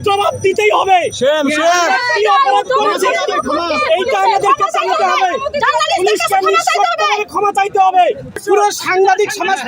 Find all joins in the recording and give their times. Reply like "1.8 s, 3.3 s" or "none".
8.4 s